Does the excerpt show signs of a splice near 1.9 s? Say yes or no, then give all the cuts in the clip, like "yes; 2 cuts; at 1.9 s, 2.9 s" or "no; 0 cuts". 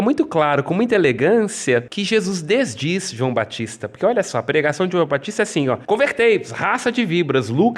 yes; 2 cuts; at 1.9 s, 5.8 s